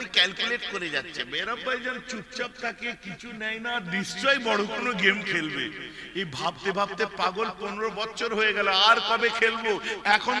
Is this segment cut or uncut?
uncut